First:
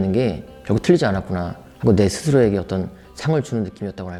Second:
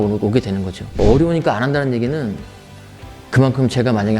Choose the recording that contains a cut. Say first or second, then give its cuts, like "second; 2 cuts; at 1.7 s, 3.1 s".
second; 1 cut; at 1.0 s